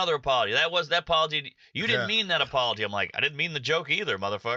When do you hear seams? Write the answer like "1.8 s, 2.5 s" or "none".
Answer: none